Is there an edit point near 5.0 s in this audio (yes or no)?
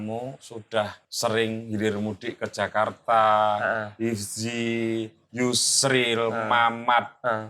no